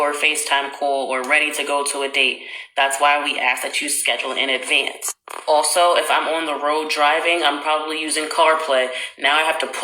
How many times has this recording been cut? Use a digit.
1